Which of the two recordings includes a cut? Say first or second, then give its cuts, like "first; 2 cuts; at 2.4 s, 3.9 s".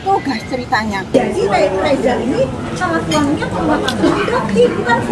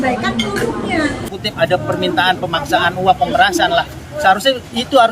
second; 1 cut; at 1.3 s